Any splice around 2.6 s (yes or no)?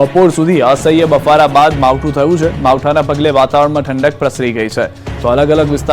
no